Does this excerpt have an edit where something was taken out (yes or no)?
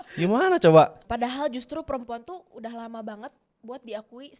yes